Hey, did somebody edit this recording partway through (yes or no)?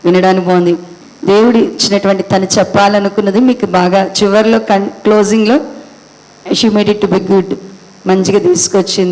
yes